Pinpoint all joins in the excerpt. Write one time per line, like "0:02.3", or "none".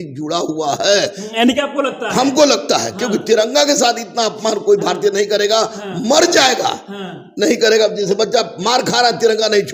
none